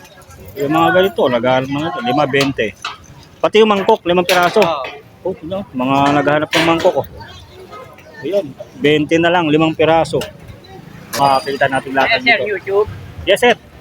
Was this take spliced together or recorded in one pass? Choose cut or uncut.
cut